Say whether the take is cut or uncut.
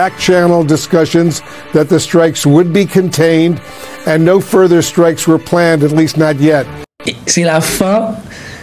cut